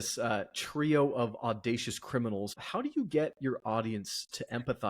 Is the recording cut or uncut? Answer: cut